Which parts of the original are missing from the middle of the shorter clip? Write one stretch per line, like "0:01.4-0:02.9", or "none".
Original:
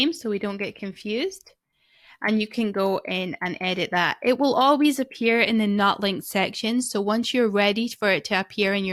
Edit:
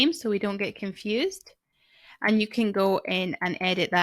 none